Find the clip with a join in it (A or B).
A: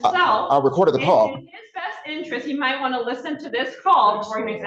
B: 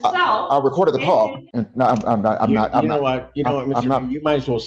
B